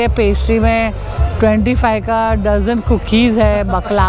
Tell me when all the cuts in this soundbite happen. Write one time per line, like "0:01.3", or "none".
none